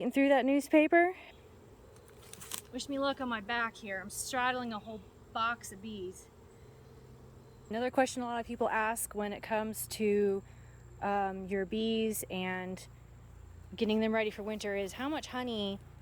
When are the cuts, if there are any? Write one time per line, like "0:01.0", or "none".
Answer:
0:01.3
0:07.7